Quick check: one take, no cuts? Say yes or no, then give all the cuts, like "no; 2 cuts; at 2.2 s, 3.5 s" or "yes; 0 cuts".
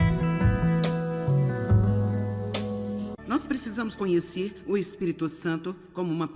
no; 1 cut; at 3.2 s